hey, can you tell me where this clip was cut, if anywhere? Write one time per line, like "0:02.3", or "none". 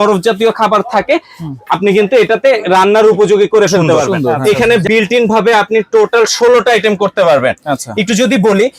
0:04.3

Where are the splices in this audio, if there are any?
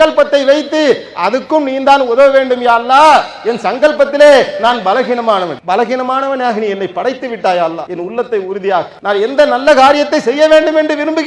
0:05.6
0:07.9
0:08.9

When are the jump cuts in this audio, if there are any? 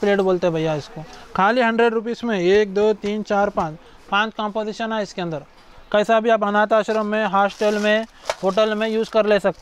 none

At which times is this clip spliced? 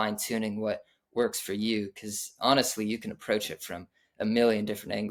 none

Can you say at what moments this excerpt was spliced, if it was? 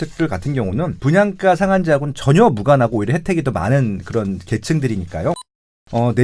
0:00.9

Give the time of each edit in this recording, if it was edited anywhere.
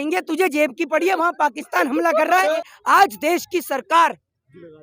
0:02.5

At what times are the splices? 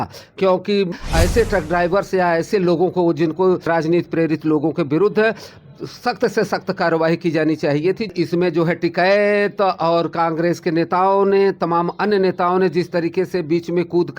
0:00.9
0:03.7
0:08.1

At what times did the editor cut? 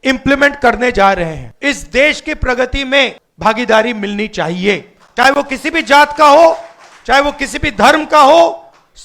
0:01.5
0:03.2

